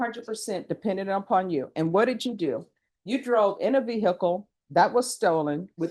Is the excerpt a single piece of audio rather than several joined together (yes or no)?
yes